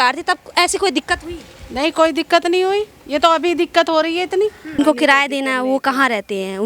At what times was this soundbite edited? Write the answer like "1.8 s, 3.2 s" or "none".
4.8 s